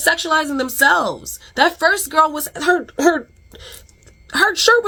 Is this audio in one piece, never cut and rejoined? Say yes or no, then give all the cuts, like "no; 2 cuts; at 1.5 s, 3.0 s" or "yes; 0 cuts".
yes; 0 cuts